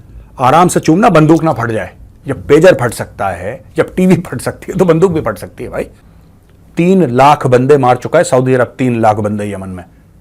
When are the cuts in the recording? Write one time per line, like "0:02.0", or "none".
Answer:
0:06.0